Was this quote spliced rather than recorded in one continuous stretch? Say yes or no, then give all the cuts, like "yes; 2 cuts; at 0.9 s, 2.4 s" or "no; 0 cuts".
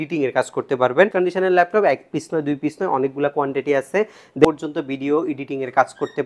yes; 2 cuts; at 1.1 s, 4.4 s